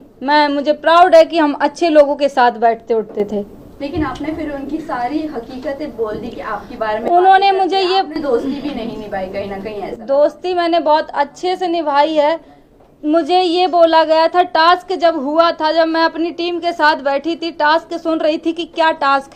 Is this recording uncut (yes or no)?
yes